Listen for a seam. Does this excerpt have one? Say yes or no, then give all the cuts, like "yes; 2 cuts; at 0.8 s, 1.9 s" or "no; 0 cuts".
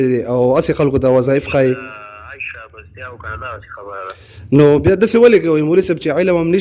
no; 0 cuts